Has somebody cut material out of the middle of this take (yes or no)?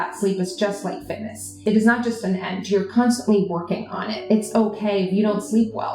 yes